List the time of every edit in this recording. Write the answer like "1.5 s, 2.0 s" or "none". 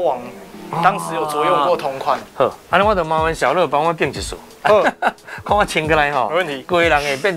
2.2 s